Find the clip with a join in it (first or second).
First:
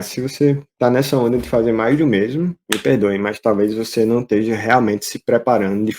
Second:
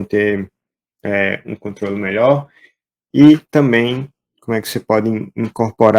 first